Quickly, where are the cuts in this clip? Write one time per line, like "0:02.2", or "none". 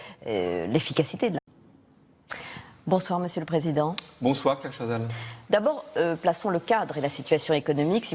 none